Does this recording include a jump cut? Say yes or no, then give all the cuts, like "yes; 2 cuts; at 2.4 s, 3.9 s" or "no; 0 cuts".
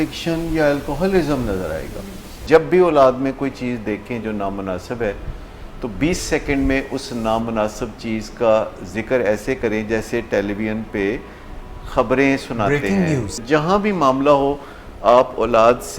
yes; 2 cuts; at 2.4 s, 13.4 s